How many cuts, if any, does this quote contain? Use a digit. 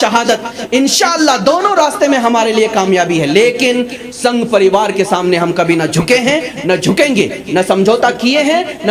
0